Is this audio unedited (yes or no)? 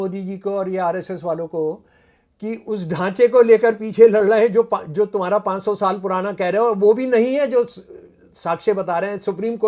yes